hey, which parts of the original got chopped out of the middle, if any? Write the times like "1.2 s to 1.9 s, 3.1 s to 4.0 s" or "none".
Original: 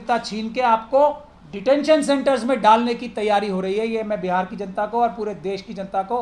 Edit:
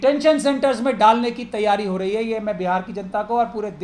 none